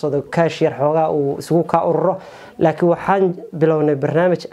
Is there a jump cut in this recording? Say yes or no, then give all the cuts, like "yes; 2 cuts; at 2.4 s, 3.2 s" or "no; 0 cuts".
no; 0 cuts